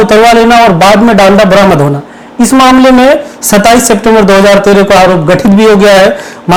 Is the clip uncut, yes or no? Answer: yes